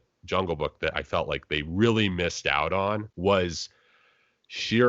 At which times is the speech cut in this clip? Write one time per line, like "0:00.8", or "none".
0:03.1